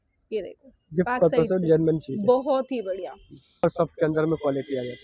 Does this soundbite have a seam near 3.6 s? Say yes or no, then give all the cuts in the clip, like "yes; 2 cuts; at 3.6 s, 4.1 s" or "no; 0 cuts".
yes; 1 cut; at 3.6 s